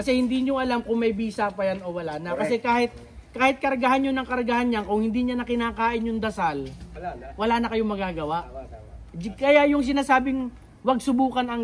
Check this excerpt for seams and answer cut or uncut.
uncut